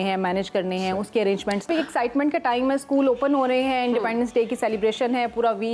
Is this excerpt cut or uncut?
cut